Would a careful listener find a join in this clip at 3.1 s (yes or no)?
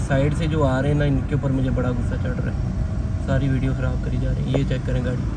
no